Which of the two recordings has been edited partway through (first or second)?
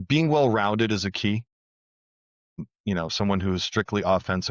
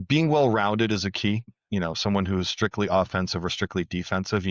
second